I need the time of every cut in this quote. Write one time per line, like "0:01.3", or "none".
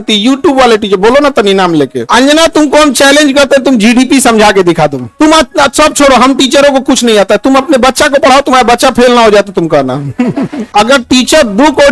0:02.1
0:10.7